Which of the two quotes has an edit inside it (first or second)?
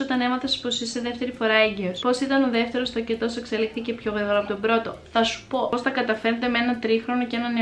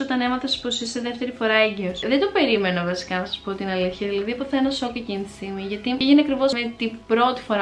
first